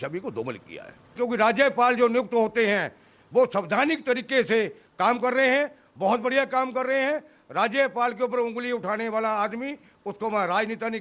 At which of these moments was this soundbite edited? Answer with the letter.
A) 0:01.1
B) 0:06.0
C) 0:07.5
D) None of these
A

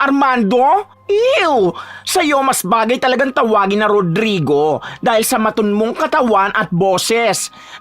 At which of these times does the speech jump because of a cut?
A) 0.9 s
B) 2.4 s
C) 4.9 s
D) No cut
A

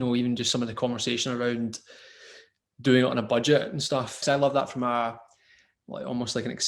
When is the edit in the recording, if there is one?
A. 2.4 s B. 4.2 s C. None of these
B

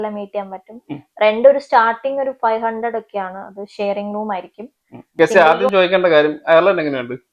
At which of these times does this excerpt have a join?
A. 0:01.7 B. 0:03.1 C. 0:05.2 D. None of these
C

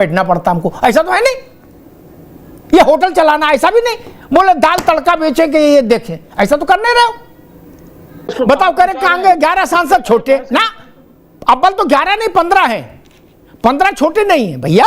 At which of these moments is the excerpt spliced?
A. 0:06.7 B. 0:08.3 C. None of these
B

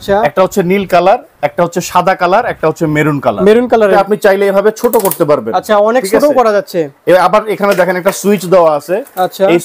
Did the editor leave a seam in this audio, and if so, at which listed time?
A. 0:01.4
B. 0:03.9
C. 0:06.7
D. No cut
B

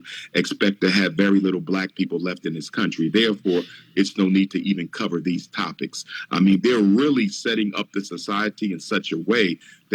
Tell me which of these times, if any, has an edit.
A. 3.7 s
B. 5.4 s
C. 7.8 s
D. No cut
D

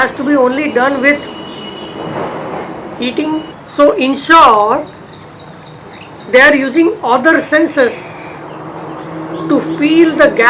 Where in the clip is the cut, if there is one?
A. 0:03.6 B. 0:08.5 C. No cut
A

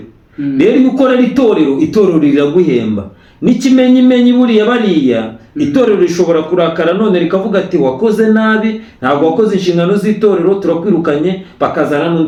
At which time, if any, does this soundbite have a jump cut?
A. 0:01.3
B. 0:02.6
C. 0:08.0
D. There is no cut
D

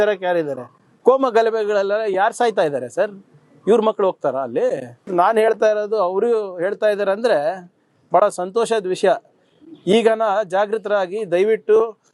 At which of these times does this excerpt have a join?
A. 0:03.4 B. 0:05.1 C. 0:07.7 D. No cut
B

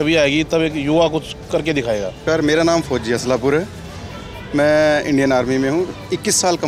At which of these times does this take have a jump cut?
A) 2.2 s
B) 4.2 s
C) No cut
A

